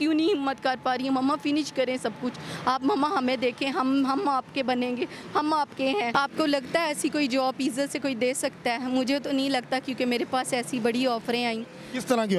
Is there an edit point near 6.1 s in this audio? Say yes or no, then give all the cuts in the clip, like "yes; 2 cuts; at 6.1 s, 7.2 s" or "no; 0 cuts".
yes; 1 cut; at 6.1 s